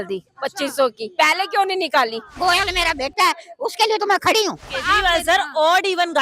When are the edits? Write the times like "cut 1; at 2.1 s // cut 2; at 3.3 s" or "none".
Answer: cut 1; at 2.4 s // cut 2; at 4.7 s